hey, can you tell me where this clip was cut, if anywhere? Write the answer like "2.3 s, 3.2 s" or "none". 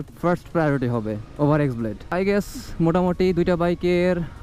none